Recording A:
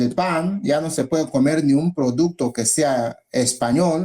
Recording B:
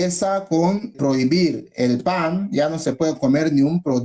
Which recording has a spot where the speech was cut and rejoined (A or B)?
B